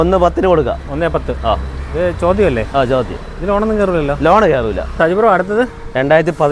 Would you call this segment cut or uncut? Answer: uncut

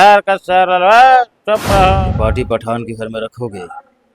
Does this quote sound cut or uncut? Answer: cut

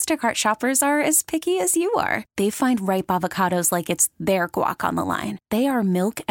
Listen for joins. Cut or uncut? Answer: uncut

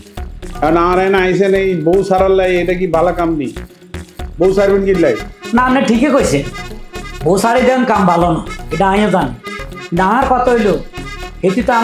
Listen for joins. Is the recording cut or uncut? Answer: uncut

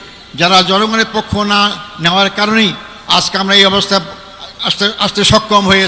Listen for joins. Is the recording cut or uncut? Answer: uncut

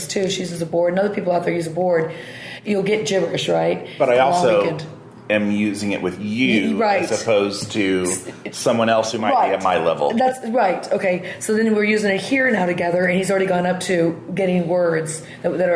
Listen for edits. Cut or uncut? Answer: cut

